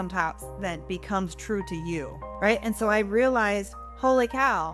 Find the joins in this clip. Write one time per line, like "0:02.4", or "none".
0:02.2